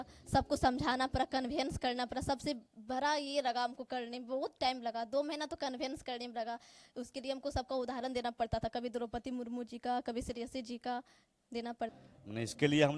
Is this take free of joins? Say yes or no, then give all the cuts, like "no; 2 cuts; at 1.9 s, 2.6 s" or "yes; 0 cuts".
no; 1 cut; at 11.9 s